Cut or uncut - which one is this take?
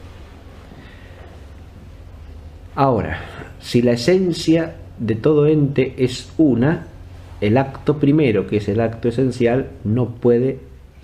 cut